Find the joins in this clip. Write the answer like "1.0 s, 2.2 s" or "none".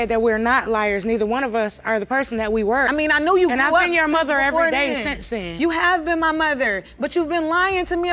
none

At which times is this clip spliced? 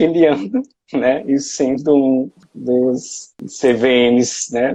none

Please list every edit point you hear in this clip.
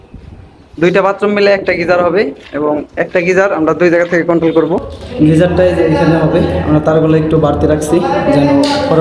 5.0 s

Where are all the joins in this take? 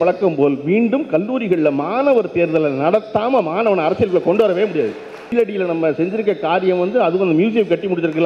5.3 s

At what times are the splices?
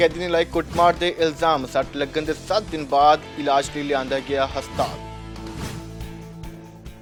none

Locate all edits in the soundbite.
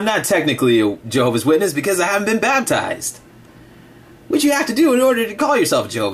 4.2 s

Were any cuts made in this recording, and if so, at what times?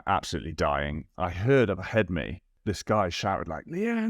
1.1 s, 2.5 s

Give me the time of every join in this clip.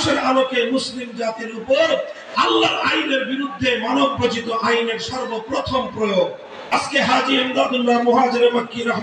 6.7 s

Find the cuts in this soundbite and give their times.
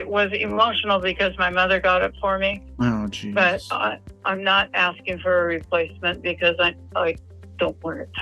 none

